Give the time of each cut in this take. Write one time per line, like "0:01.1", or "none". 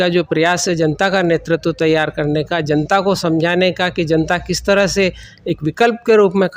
none